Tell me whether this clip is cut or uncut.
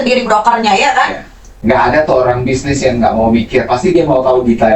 cut